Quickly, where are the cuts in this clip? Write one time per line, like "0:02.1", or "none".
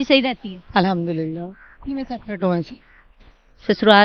none